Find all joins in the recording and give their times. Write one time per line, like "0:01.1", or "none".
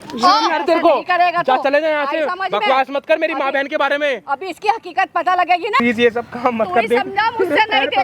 0:05.8